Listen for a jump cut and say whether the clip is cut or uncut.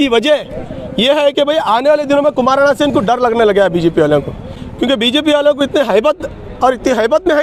uncut